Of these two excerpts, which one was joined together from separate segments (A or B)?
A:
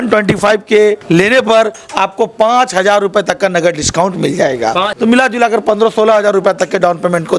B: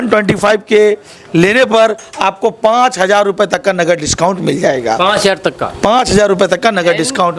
A